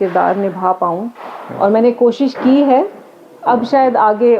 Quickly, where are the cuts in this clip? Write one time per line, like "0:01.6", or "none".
none